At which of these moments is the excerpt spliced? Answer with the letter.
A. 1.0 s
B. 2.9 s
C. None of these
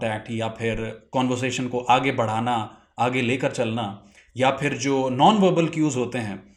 C